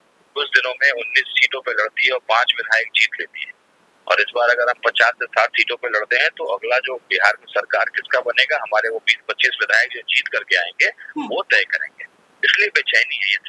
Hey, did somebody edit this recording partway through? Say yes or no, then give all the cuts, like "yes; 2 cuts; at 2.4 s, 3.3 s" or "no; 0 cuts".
no; 0 cuts